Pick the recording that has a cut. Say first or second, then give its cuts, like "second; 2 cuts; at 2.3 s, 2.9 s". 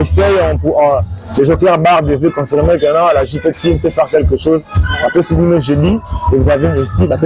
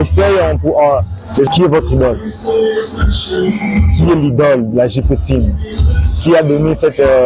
second; 1 cut; at 1.5 s